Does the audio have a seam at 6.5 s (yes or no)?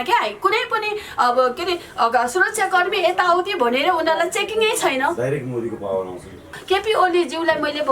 yes